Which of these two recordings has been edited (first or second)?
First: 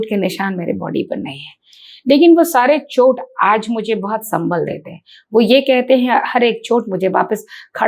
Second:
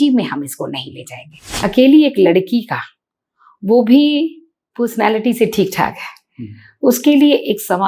second